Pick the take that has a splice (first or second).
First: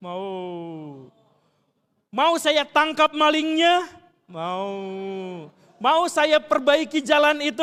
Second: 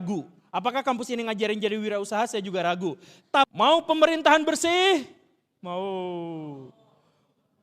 second